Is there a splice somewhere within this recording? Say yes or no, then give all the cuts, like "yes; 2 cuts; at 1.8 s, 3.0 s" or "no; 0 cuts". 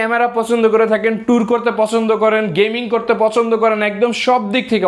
no; 0 cuts